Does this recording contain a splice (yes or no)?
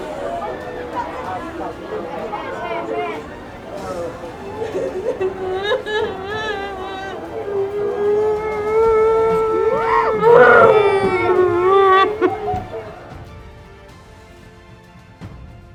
no